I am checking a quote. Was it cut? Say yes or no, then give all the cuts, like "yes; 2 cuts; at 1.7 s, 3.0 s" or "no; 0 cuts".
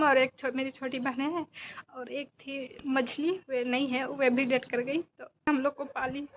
yes; 1 cut; at 5.5 s